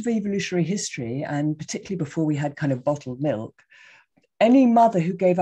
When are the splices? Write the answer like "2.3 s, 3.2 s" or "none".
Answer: none